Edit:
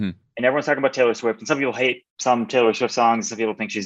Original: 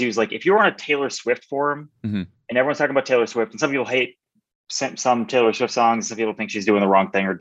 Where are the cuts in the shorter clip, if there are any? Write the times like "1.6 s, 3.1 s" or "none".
2.1 s